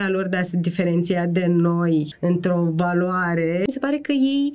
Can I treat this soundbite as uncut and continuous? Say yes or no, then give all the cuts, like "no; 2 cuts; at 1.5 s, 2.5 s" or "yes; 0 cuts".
no; 2 cuts; at 2.1 s, 3.6 s